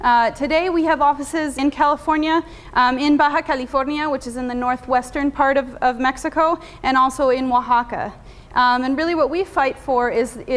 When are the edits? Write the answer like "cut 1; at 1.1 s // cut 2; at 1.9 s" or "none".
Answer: cut 1; at 1.6 s